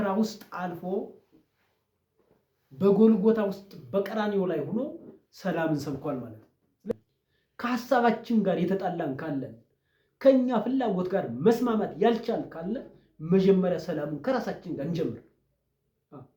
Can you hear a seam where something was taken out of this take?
yes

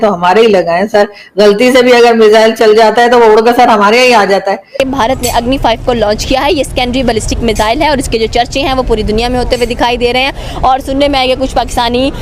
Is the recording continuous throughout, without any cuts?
no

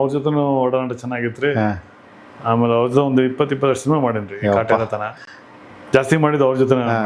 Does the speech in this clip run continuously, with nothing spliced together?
yes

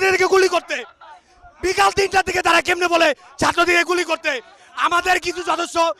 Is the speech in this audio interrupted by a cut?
no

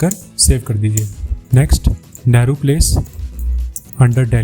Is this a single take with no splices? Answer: yes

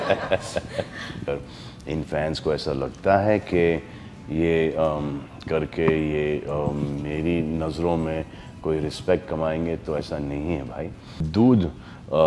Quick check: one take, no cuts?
no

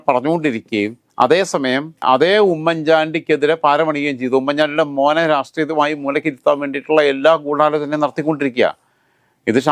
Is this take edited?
no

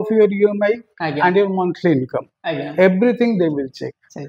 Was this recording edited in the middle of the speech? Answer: no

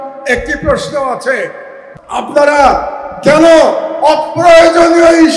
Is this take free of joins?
no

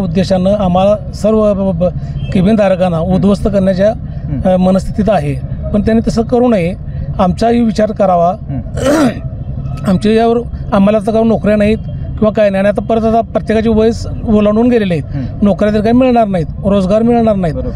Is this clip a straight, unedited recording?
yes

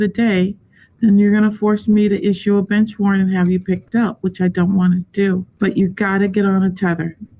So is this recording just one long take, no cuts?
no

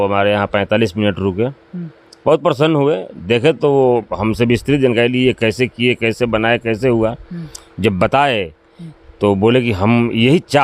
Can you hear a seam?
no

